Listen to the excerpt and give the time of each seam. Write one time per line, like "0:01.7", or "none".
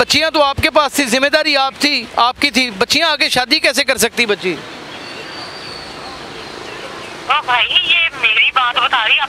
none